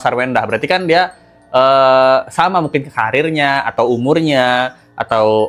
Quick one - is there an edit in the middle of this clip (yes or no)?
no